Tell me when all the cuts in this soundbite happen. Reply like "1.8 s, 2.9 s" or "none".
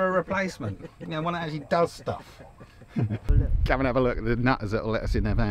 3.3 s